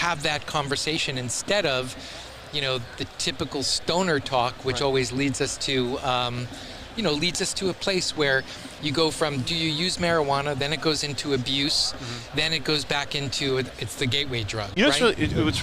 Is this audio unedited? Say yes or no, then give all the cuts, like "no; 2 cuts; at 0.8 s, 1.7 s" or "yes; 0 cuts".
no; 1 cut; at 14.7 s